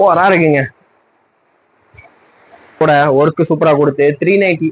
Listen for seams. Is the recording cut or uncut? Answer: cut